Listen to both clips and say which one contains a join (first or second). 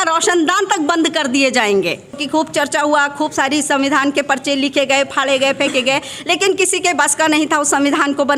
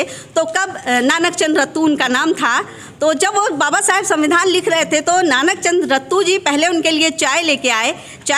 first